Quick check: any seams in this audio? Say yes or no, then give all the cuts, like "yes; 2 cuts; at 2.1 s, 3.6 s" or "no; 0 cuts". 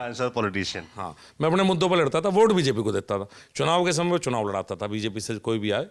no; 0 cuts